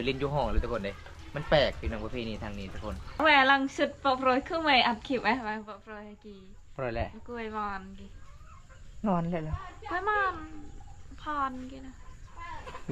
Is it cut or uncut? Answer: cut